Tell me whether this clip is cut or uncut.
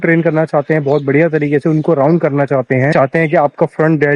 cut